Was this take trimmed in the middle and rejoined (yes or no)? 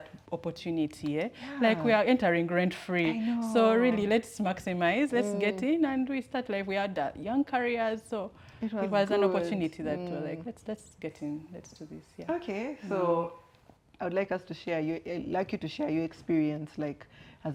no